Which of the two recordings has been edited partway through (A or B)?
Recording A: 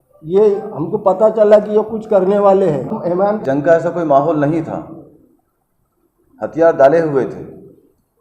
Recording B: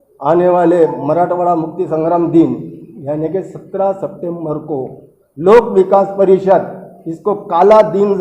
A